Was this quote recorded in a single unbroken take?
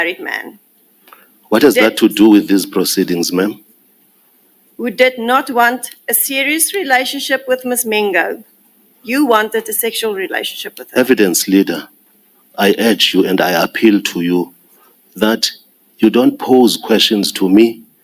yes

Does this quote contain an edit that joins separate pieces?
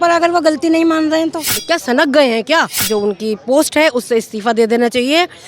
yes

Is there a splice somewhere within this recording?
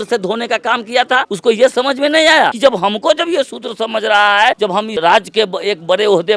yes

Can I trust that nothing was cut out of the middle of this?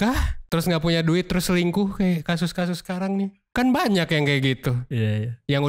yes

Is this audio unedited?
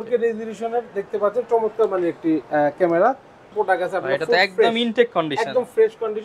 no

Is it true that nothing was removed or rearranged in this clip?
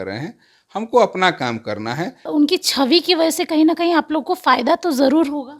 no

